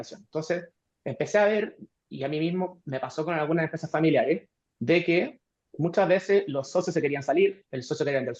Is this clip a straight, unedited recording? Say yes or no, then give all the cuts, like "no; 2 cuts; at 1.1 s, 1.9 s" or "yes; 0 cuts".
yes; 0 cuts